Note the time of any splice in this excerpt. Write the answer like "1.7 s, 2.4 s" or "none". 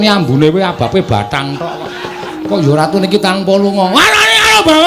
2.4 s